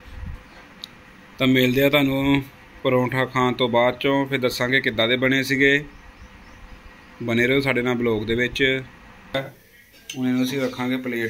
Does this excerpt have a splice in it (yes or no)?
yes